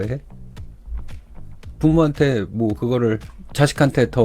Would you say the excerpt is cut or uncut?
cut